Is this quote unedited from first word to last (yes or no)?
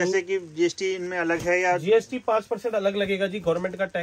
yes